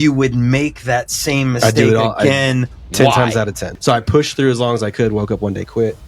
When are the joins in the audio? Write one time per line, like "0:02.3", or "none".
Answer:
0:03.7